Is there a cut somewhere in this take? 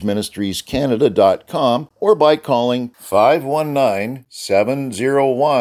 yes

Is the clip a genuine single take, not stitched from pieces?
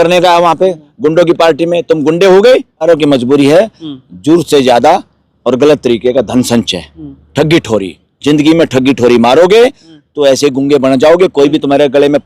no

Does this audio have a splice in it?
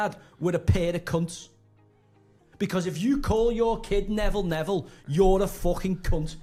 no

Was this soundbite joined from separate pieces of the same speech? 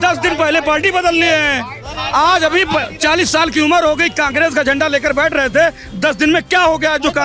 no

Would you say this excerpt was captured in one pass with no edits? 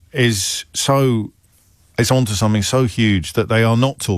yes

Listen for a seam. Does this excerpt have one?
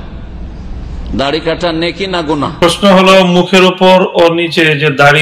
yes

